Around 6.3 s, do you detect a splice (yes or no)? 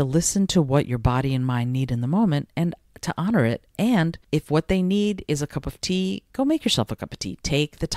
no